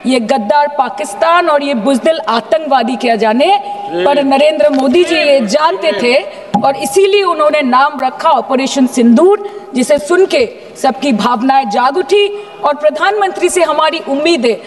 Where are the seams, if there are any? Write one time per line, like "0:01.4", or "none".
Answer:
none